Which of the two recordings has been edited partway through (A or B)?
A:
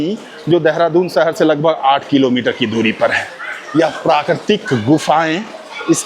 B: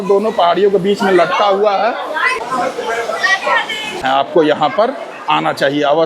B